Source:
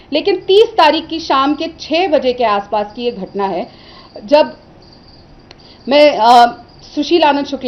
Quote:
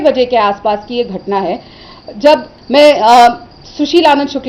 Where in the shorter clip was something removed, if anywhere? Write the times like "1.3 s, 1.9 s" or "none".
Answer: 2.5 s

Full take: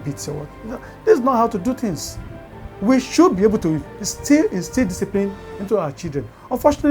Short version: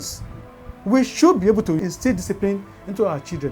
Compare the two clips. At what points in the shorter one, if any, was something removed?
1.9 s

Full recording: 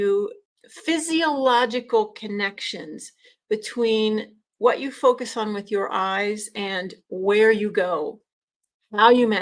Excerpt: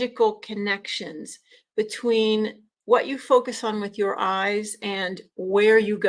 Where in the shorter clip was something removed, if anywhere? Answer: none

